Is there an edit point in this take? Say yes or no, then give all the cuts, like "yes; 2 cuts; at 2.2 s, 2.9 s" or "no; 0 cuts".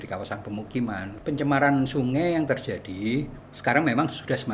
yes; 2 cuts; at 1.1 s, 3.4 s